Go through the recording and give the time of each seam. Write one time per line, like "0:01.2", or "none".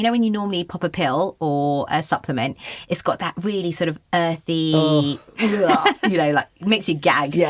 none